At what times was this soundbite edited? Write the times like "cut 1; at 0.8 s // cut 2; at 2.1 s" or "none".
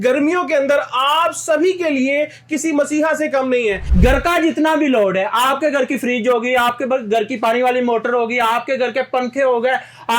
cut 1; at 3.9 s